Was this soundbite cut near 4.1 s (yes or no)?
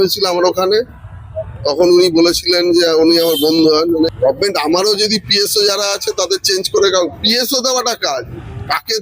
yes